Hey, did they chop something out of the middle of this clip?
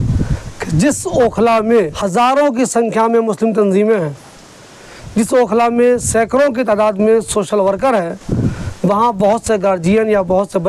yes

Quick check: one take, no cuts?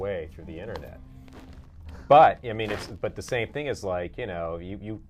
yes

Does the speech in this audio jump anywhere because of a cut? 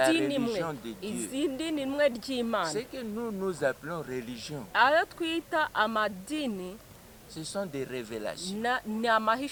no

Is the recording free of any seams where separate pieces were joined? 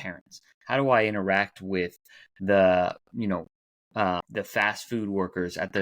no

